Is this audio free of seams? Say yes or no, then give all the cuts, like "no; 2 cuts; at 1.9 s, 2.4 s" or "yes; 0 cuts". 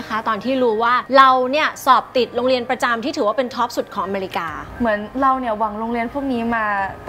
no; 2 cuts; at 1.0 s, 4.6 s